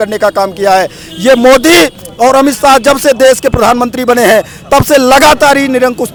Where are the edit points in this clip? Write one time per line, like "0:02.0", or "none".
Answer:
none